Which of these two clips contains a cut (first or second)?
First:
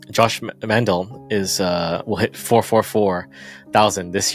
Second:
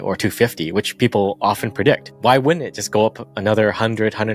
second